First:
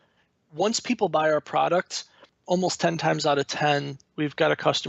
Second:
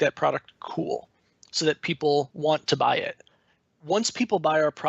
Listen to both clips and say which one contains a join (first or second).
second